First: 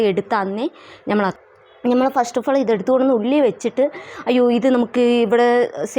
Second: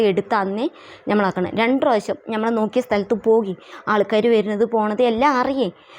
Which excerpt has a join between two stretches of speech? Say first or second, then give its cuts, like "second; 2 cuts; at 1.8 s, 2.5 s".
first; 1 cut; at 1.3 s